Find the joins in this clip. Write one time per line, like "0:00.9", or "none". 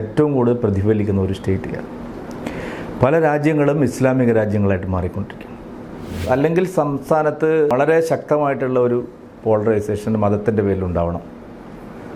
0:06.2
0:07.7